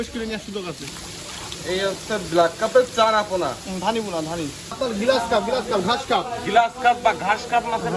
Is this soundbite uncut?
no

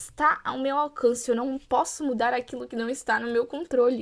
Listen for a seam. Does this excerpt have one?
no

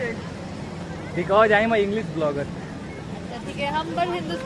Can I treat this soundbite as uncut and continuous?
yes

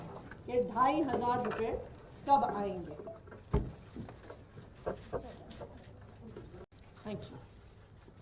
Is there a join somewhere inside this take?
yes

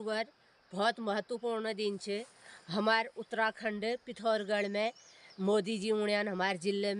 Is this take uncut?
yes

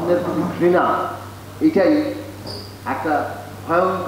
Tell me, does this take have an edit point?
no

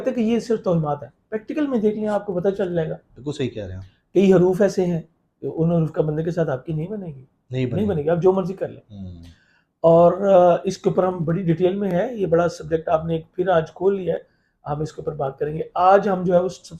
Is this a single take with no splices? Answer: yes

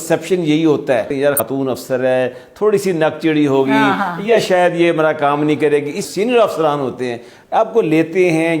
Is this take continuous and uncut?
no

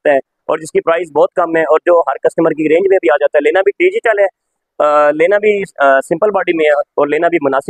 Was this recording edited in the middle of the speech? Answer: no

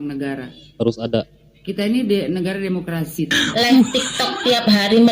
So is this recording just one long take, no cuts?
no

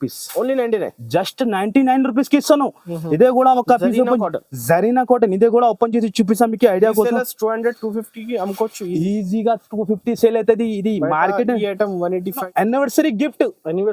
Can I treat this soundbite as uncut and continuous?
no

